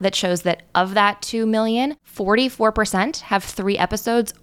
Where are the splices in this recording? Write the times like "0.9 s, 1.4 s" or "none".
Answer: 2.1 s